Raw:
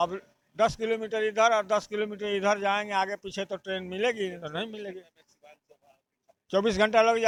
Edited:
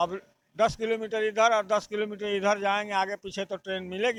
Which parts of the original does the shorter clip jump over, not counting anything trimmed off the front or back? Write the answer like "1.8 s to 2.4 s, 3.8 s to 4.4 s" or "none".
none